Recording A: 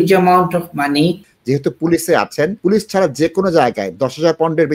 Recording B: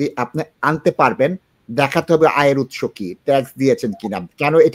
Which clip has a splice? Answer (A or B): A